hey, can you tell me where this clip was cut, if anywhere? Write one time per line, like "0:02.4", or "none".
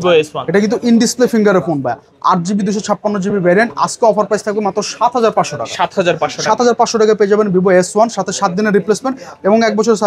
none